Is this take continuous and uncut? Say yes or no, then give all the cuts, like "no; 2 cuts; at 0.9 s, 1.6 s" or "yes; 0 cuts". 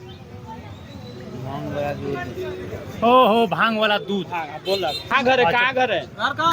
no; 1 cut; at 5.1 s